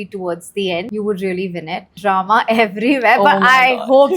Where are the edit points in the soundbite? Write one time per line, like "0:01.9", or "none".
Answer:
0:00.9
0:02.0